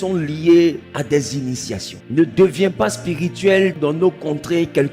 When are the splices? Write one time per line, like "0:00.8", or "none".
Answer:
0:00.9
0:01.9
0:03.7